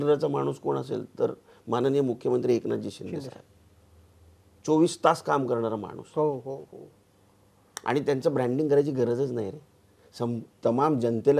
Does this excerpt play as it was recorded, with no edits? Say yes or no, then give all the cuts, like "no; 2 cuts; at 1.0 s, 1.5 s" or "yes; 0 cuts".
yes; 0 cuts